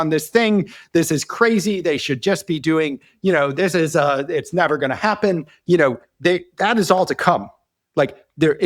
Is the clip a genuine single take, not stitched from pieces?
yes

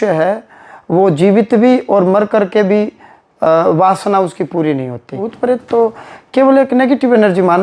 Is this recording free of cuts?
no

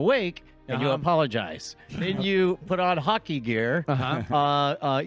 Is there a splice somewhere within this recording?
yes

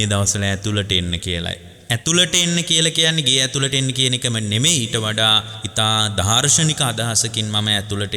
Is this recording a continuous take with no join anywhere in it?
no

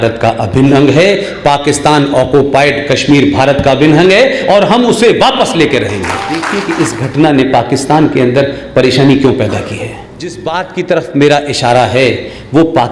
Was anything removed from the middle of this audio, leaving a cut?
yes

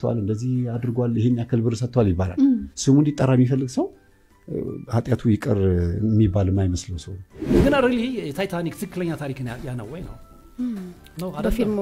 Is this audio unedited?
no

